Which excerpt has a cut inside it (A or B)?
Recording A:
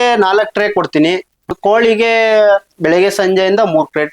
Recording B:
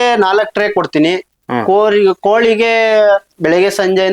A